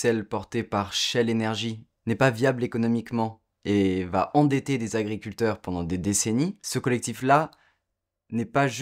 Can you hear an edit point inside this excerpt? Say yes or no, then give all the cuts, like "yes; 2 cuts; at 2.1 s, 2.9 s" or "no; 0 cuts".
yes; 1 cut; at 6.6 s